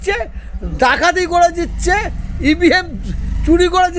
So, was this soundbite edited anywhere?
no; 0 cuts

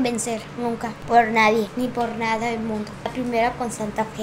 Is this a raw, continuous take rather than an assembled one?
no; 3 cuts; at 0.9 s, 1.7 s, 3.1 s

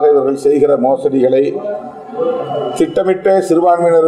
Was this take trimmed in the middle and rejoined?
no; 0 cuts

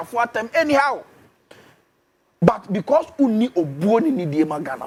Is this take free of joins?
yes; 0 cuts

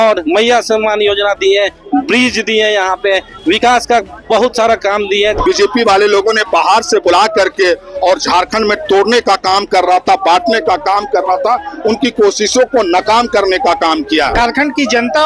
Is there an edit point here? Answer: yes; 2 cuts; at 5.4 s, 14.3 s

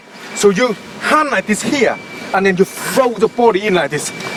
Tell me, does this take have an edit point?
no; 0 cuts

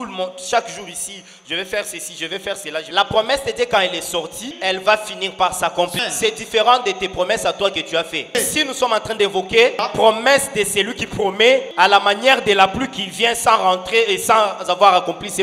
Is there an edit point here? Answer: yes; 6 cuts; at 2.9 s, 4.5 s, 6.0 s, 8.3 s, 9.8 s, 11.7 s

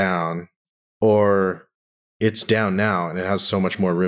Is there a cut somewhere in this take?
no; 0 cuts

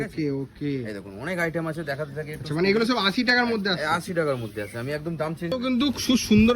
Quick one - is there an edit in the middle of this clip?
yes; 1 cut; at 5.5 s

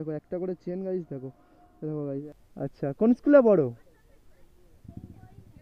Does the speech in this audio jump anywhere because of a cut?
yes; 1 cut; at 2.2 s

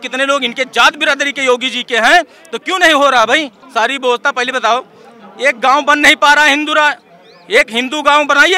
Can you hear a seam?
yes; 1 cut; at 3.6 s

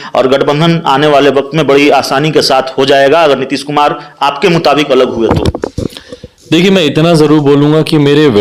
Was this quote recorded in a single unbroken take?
yes; 0 cuts

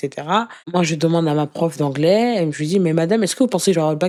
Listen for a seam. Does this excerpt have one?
no; 0 cuts

